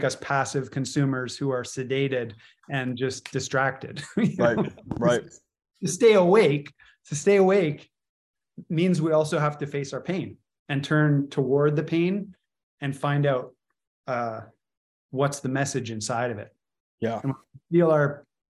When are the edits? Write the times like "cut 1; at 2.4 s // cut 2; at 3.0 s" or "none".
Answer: none